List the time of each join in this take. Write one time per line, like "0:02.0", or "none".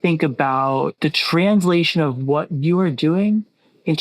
0:00.9